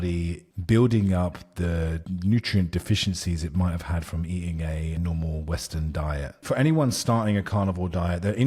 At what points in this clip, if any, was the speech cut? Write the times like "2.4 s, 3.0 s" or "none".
5.0 s, 6.3 s

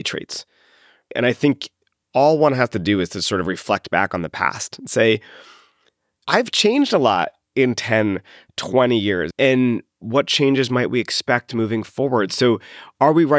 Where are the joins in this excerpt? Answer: 9.3 s

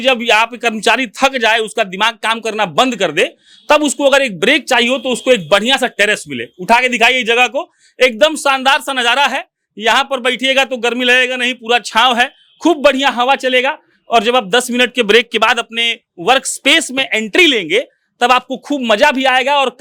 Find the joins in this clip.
none

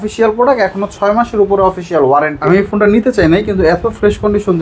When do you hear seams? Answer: 2.4 s

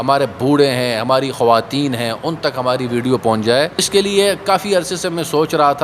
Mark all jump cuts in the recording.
3.9 s

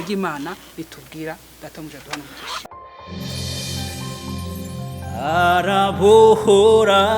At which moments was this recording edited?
2.6 s

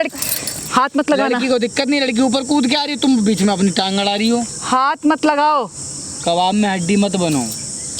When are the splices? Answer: none

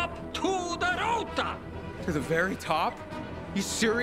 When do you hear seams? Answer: none

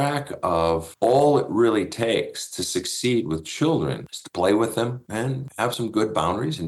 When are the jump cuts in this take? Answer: none

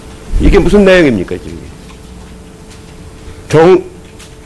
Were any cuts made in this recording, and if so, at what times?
none

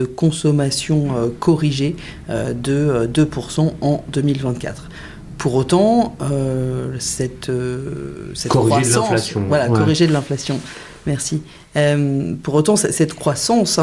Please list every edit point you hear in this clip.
none

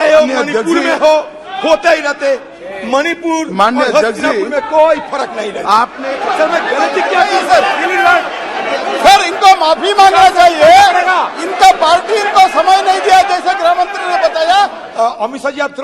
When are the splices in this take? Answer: 6.1 s, 14.8 s

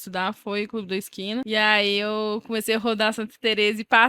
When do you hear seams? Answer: 1.5 s

